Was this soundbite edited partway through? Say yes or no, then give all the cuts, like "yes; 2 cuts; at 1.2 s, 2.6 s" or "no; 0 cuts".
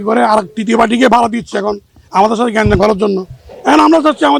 no; 0 cuts